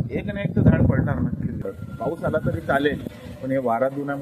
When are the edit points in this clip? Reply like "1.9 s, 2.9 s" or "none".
1.6 s

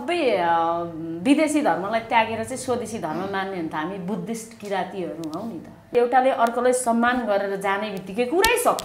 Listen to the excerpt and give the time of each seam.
5.9 s

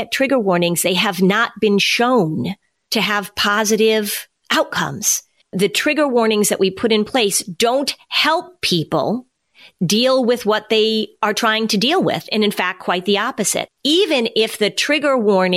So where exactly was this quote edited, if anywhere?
none

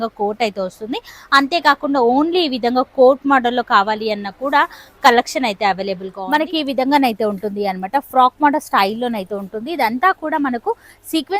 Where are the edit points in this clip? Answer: 6.4 s

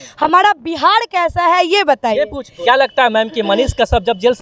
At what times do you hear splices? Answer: 2.5 s

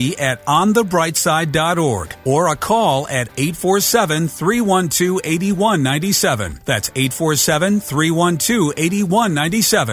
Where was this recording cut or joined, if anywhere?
2.1 s, 6.5 s

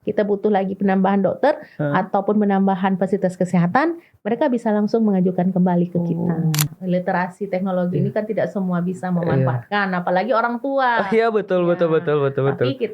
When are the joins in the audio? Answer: 6.7 s

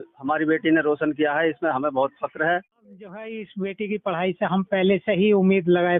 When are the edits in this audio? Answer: 3.1 s

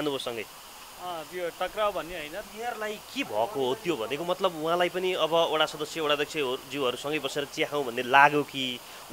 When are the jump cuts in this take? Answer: 2.4 s

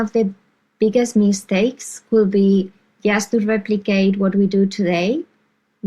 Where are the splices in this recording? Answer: none

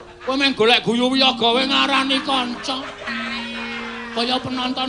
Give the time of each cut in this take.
none

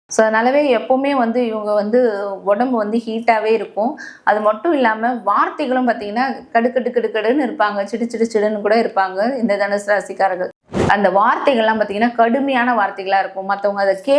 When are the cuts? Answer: 10.7 s

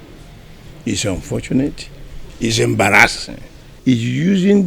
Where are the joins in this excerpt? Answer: 3.7 s

